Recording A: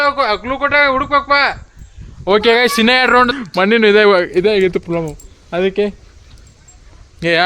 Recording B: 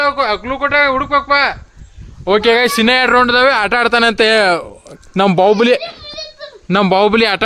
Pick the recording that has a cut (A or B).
A